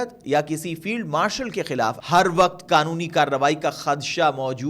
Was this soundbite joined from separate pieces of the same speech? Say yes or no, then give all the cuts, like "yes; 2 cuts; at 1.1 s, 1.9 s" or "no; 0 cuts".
yes; 1 cut; at 2.0 s